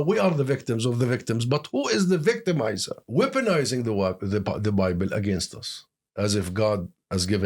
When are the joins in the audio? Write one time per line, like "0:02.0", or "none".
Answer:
0:03.0